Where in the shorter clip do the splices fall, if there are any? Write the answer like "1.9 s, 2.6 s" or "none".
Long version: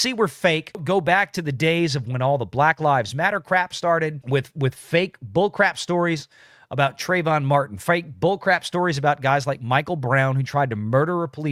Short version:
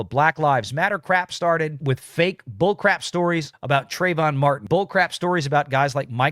1.8 s, 3.5 s, 4.6 s